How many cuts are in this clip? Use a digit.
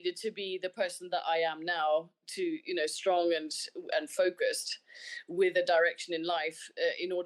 0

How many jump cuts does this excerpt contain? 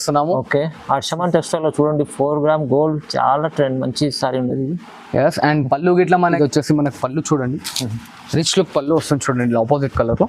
1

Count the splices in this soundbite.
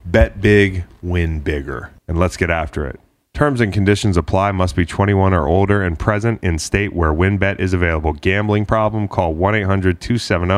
1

